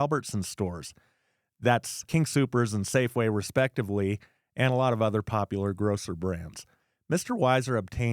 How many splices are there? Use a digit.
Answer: 1